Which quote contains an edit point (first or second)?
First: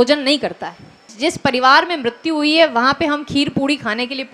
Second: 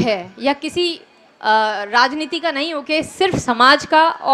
first